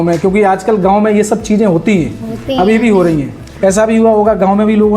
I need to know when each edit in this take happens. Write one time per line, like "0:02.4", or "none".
0:03.4